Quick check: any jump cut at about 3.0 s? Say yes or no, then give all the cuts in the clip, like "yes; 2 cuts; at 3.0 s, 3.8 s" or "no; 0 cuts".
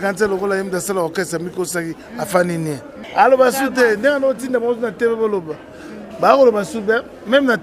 yes; 1 cut; at 3.0 s